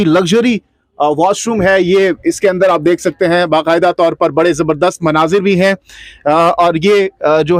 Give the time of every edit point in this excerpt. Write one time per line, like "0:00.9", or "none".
none